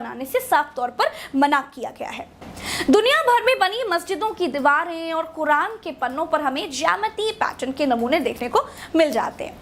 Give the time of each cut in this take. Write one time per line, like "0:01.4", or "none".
0:02.5